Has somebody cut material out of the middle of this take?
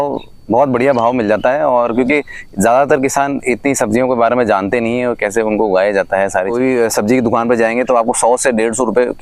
yes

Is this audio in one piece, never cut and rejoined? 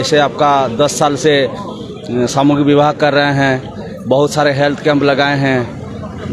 yes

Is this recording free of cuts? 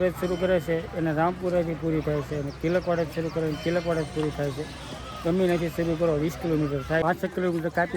no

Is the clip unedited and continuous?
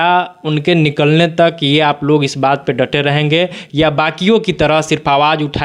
yes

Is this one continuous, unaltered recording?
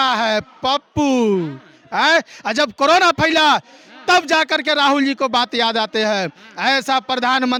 yes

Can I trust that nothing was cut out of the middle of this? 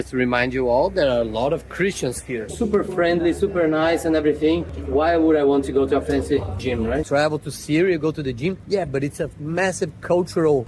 no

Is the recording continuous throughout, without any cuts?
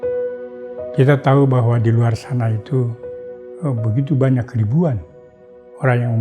no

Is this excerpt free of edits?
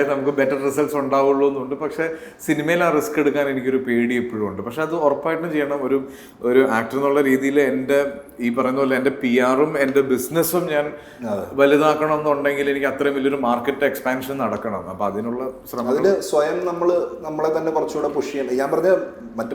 yes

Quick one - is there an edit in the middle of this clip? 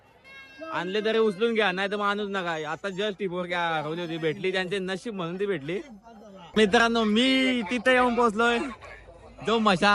yes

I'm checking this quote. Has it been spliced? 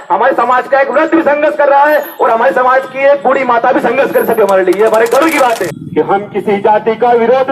yes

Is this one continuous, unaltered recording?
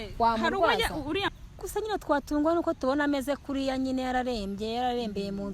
no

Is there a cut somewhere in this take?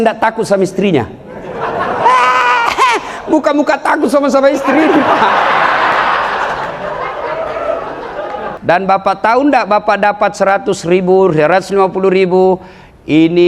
yes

